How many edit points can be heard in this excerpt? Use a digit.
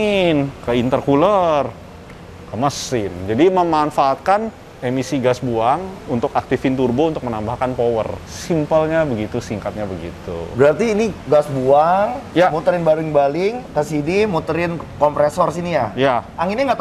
0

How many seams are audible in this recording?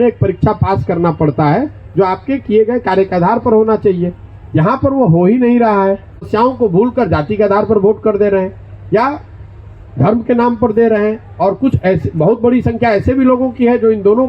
1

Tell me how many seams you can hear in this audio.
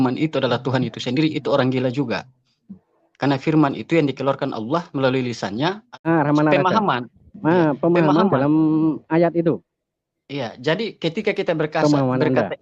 1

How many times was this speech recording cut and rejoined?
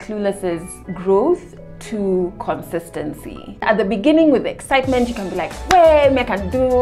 1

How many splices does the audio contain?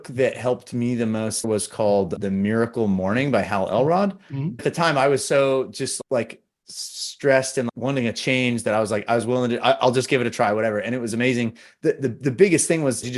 3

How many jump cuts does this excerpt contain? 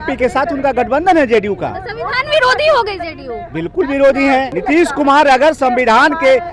1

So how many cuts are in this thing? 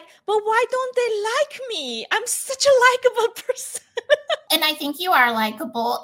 1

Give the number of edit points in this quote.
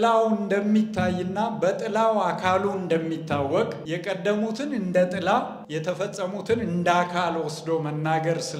2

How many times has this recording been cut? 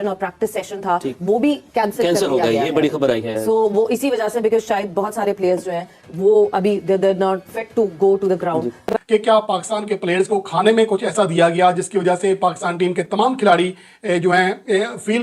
1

